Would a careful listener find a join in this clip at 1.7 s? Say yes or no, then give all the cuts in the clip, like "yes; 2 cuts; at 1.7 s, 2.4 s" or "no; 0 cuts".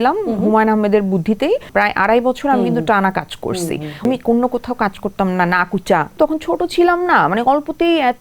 yes; 3 cuts; at 1.7 s, 4.0 s, 6.1 s